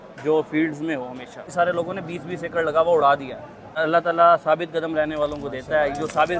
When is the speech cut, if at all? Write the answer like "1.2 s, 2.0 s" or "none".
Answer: 1.5 s, 3.7 s